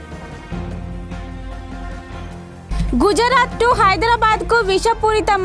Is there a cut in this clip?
yes; 1 cut; at 2.3 s

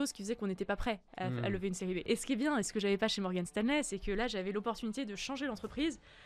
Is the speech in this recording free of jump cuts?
no; 1 cut; at 2.0 s

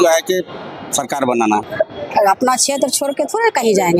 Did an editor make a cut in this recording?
yes; 1 cut; at 1.7 s

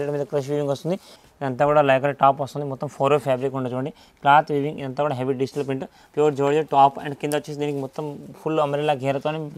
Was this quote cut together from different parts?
yes; 2 cuts; at 1.1 s, 6.0 s

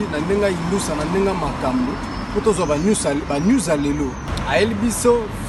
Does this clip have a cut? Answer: no; 0 cuts

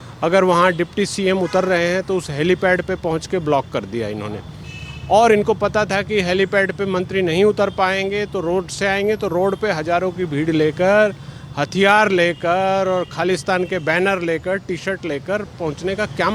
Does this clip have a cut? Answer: no; 0 cuts

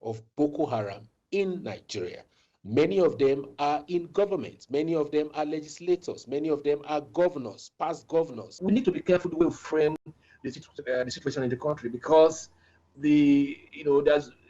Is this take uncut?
no; 1 cut; at 8.5 s

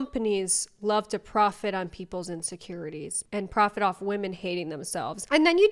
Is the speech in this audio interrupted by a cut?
no; 0 cuts

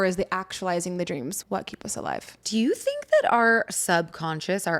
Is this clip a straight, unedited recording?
no; 2 cuts; at 1.4 s, 2.4 s

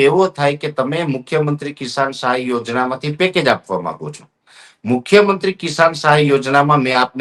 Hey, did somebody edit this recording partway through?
no; 0 cuts

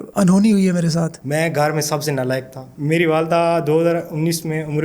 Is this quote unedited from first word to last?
no; 2 cuts; at 1.2 s, 2.6 s

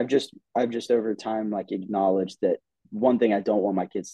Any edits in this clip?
no; 0 cuts

